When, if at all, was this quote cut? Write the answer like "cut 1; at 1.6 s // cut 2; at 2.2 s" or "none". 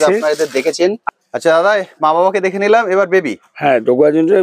cut 1; at 1.1 s